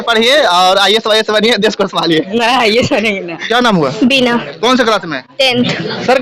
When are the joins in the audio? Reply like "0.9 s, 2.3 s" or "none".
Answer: 3.3 s